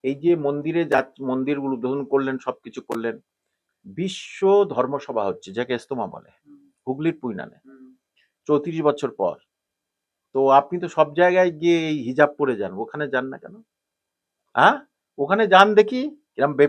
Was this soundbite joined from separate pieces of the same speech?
no; 0 cuts

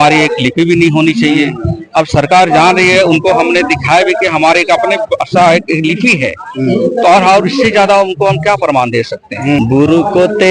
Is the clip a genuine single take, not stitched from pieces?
no; 1 cut; at 9.6 s

